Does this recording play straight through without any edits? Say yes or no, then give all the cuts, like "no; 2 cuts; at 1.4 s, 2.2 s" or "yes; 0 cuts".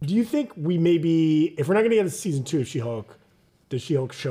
yes; 0 cuts